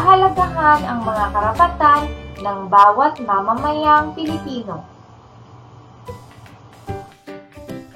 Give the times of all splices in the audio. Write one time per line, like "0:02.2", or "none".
none